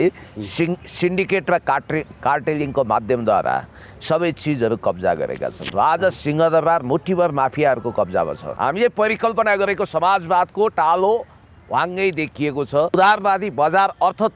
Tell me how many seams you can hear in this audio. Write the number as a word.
three